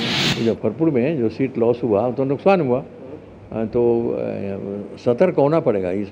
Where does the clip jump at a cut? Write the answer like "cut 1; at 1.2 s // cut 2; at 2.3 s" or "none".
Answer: none